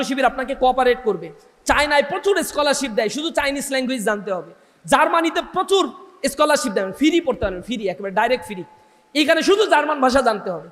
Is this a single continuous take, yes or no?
yes